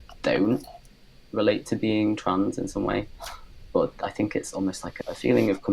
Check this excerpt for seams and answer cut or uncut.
cut